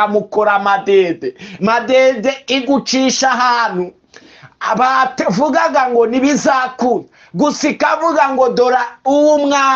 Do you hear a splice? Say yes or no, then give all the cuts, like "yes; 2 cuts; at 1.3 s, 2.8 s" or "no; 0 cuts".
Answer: no; 0 cuts